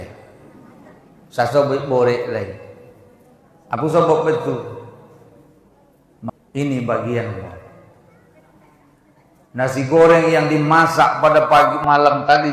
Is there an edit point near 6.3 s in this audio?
yes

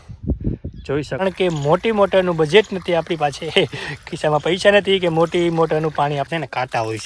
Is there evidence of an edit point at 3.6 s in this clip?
no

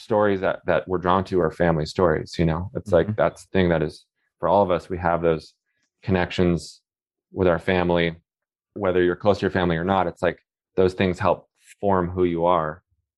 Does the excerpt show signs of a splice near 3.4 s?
yes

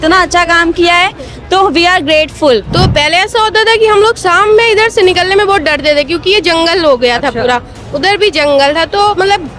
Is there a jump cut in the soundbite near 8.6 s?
no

